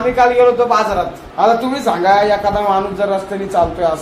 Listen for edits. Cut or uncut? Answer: cut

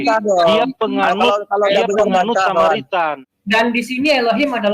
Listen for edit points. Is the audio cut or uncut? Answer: cut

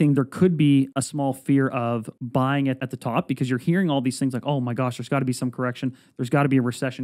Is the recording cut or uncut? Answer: cut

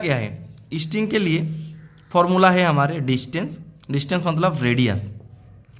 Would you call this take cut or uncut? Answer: uncut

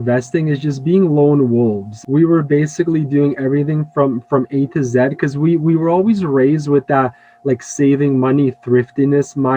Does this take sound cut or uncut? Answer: cut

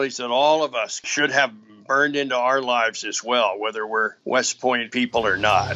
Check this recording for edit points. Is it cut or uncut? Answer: cut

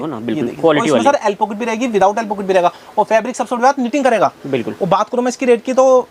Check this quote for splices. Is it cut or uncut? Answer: uncut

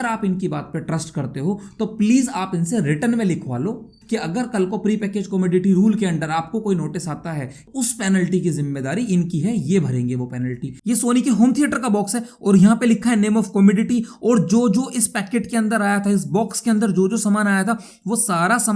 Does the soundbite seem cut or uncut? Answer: cut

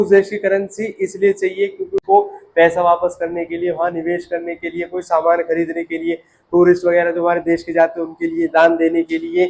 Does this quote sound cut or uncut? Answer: cut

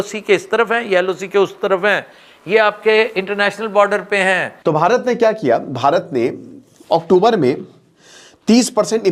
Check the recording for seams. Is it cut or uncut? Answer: cut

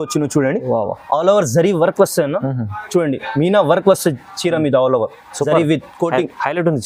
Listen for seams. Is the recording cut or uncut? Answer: uncut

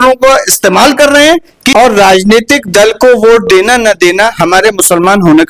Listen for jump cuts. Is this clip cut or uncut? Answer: cut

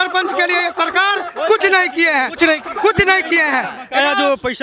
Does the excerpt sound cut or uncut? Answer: uncut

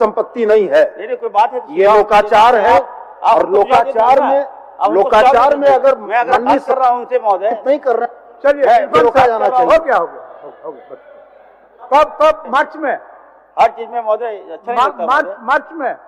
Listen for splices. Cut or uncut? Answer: uncut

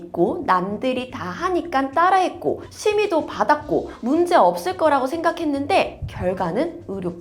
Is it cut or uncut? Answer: uncut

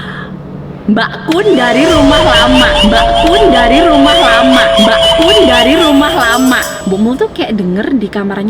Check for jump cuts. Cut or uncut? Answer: cut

